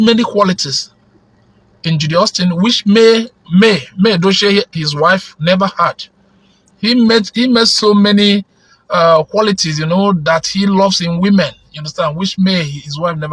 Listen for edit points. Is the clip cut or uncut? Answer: uncut